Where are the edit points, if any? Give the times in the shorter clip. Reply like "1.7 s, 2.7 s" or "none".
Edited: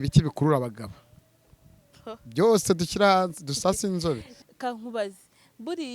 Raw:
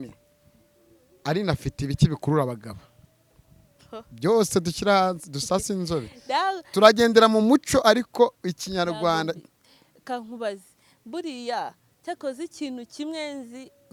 4.3 s